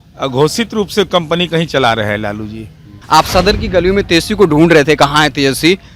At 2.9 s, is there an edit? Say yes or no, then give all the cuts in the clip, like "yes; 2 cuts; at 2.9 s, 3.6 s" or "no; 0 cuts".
yes; 1 cut; at 2.9 s